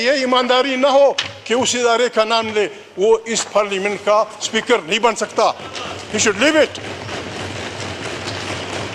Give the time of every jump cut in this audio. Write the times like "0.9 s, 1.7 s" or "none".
none